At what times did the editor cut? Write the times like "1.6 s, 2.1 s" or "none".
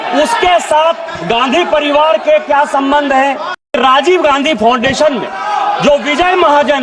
3.6 s